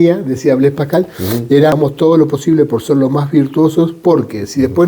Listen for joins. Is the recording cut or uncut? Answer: cut